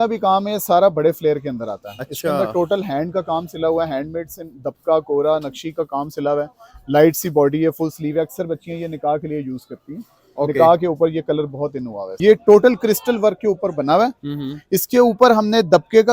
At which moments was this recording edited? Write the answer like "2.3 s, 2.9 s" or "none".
12.1 s